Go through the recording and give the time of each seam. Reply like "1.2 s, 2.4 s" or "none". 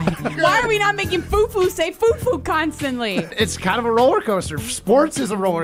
none